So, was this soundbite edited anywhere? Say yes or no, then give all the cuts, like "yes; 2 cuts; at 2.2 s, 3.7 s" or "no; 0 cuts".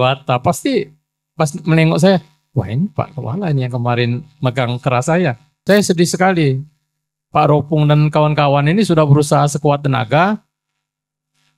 yes; 1 cut; at 5.5 s